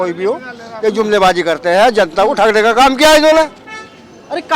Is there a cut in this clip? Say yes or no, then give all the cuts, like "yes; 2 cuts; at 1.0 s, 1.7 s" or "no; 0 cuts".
no; 0 cuts